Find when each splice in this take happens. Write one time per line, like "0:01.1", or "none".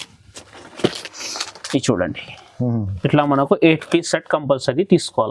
none